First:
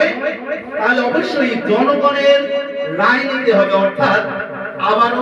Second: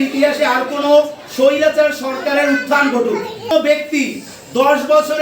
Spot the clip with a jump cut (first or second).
second